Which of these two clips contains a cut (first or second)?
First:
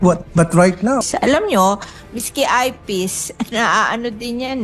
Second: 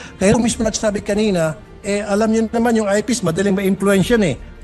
first